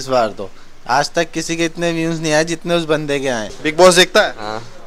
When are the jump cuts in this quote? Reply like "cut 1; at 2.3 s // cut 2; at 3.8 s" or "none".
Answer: cut 1; at 3.5 s